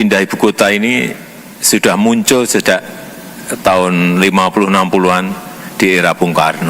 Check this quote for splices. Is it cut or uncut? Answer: uncut